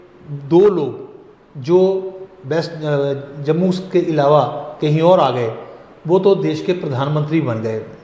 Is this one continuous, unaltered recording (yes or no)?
yes